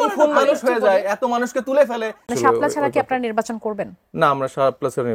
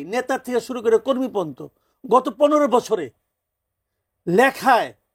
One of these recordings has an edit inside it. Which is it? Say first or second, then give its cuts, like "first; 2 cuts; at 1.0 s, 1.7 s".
first; 1 cut; at 2.3 s